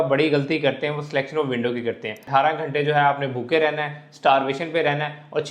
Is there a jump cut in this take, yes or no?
yes